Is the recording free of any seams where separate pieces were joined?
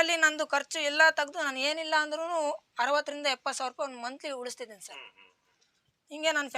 yes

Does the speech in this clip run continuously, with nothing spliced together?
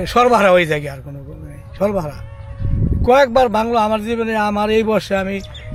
yes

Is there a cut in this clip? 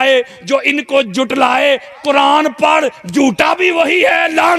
no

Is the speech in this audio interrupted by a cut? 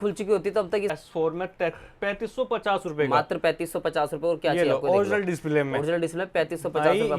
yes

